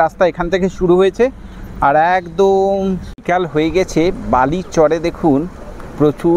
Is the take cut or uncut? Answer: cut